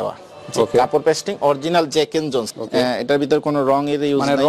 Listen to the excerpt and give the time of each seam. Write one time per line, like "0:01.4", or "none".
0:02.6